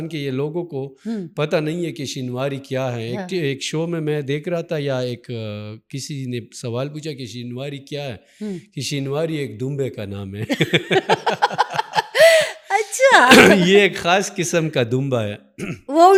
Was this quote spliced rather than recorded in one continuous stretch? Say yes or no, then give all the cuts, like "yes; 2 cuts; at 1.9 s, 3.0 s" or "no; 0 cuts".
no; 0 cuts